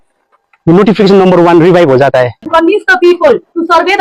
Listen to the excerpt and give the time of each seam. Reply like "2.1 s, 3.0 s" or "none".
2.4 s